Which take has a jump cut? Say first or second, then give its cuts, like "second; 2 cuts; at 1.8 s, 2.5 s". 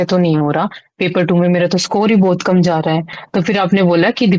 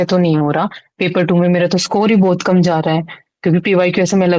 first; 1 cut; at 3.2 s